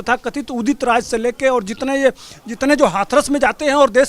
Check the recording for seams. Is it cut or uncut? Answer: uncut